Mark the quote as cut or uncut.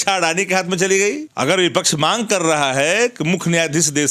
cut